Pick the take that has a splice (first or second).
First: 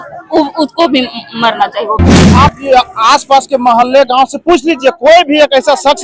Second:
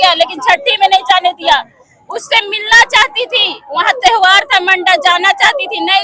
first